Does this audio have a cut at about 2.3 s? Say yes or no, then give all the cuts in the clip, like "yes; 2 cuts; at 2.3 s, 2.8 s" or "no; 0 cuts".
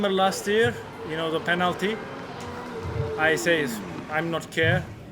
no; 0 cuts